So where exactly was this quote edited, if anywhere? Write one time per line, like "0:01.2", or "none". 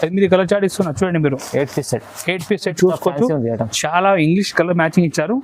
0:02.7